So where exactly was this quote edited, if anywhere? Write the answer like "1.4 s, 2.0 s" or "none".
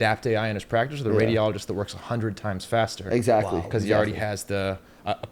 none